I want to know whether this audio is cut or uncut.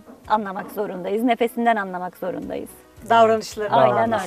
uncut